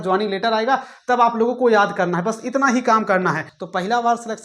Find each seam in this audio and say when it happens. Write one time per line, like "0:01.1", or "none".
0:03.5